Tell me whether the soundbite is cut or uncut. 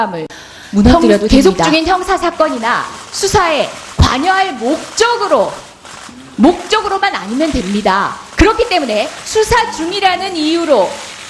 uncut